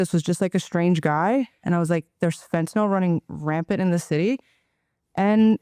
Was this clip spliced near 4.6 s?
no; 0 cuts

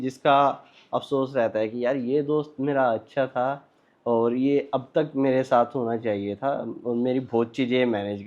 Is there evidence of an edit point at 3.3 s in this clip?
no; 0 cuts

